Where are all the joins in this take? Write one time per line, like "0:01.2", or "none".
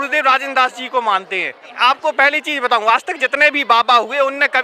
0:01.7